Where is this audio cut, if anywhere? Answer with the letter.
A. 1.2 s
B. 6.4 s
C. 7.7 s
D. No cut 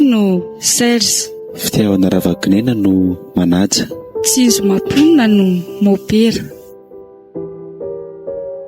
B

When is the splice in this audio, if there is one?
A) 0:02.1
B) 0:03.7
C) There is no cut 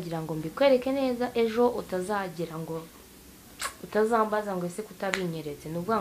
C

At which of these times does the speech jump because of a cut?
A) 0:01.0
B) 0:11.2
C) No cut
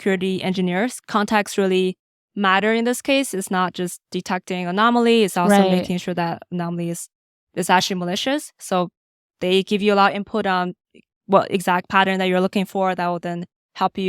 A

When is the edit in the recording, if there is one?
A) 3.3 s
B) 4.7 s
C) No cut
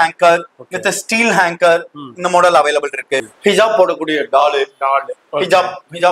A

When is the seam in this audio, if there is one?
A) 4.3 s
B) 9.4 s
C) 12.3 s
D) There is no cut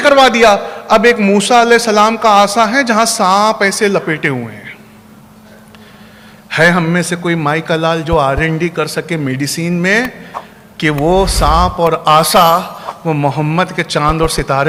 D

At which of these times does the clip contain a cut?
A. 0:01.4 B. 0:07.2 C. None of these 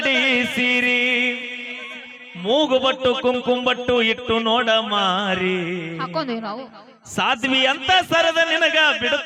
C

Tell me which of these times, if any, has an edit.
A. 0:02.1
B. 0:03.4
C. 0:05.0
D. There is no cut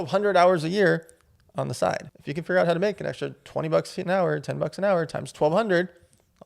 A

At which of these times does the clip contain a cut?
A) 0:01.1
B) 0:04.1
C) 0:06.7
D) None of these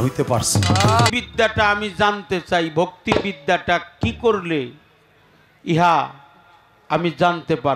A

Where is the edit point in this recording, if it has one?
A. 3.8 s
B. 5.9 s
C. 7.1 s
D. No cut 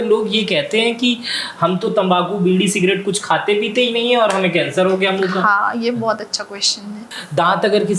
C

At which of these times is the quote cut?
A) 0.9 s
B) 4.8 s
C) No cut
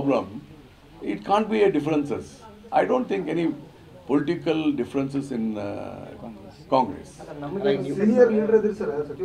C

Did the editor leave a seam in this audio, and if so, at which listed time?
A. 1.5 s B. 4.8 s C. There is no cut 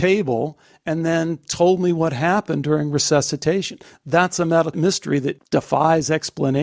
B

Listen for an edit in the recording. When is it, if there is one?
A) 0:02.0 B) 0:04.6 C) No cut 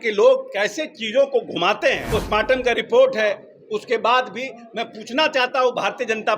A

